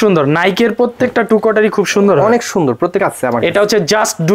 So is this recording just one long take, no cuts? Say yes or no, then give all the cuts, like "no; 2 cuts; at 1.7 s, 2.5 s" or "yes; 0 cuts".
no; 1 cut; at 3.0 s